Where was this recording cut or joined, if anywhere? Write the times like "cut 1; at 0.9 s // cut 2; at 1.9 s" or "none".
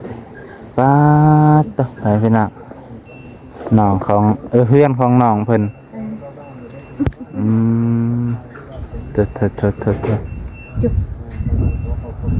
none